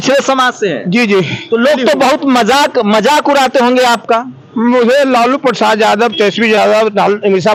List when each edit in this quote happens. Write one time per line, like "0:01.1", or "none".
none

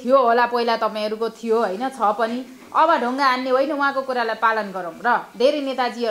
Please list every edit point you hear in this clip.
none

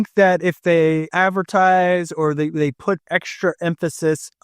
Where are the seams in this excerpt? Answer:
0:01.1

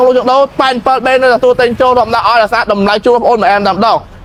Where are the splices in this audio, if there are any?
none

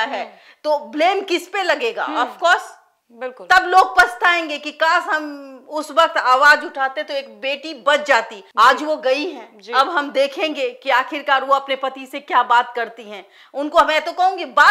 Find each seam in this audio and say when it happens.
none

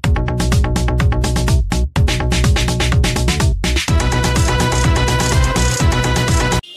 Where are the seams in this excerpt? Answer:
none

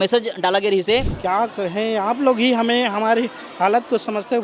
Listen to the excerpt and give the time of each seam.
0:01.1

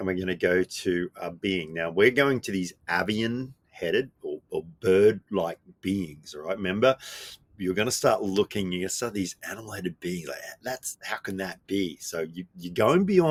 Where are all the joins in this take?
none

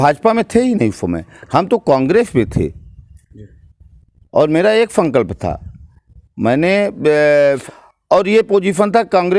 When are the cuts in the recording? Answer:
0:07.7

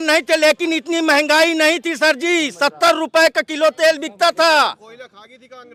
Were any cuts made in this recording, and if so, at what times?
none

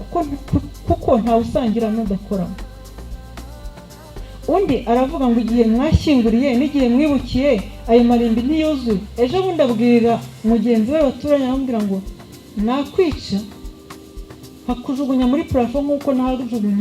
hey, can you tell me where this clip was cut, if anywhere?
0:09.1

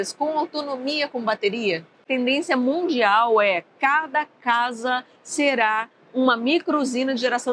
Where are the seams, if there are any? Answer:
0:02.1

